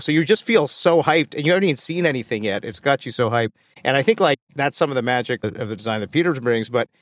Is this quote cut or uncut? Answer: uncut